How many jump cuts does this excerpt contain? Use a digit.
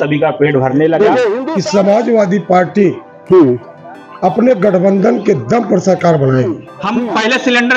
2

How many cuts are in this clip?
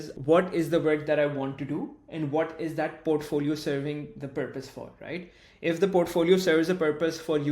0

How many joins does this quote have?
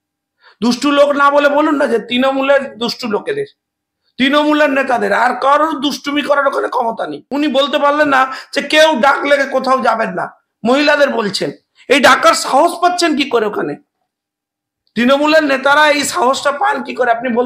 1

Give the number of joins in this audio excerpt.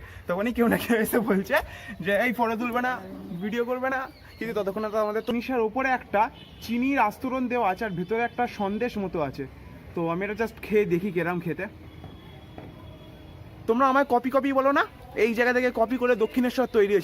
2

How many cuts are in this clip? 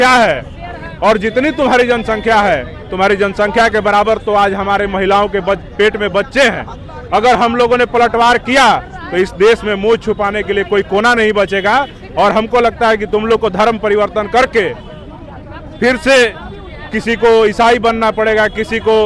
0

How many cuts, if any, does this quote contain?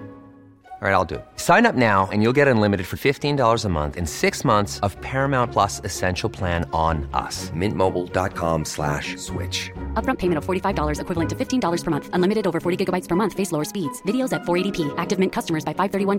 0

